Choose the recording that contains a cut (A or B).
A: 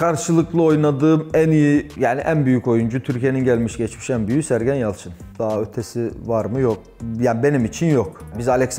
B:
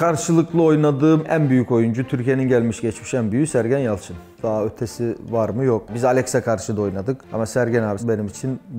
B